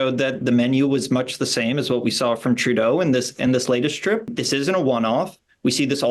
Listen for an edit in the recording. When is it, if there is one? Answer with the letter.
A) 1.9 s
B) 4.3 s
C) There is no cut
B